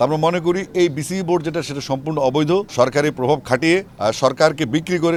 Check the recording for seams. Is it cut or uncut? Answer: uncut